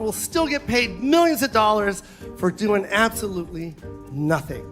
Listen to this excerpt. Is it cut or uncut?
uncut